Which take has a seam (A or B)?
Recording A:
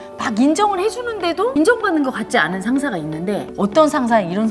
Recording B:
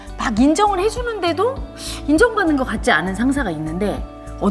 A